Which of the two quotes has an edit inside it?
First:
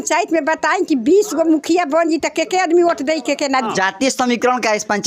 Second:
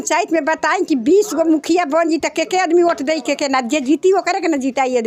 first; 1 cut; at 3.7 s

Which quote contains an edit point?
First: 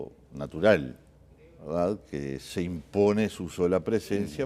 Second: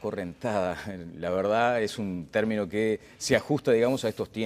first; 1 cut; at 2.9 s

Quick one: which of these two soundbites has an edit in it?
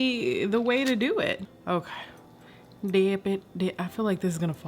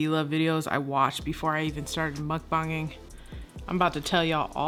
first; 1 cut; at 1.5 s

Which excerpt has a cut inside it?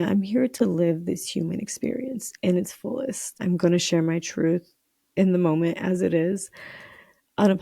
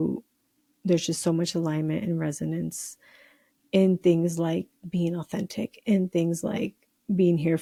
first; 1 cut; at 3.4 s

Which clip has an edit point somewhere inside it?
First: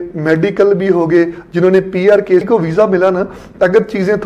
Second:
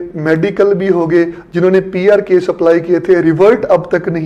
first; 1 cut; at 2.4 s

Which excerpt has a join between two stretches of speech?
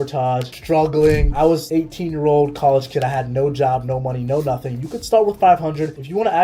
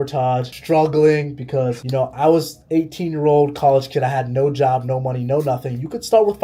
first; 1 cut; at 1.5 s

